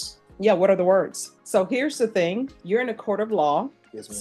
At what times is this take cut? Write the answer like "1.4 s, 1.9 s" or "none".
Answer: 1.3 s, 2.5 s